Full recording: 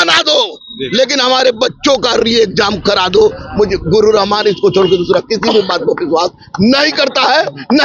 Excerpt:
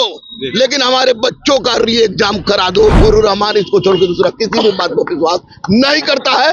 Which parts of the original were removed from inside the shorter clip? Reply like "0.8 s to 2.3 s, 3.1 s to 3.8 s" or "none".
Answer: 3.3 s to 3.9 s